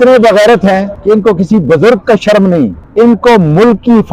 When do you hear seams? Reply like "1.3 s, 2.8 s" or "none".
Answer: 0.9 s, 2.8 s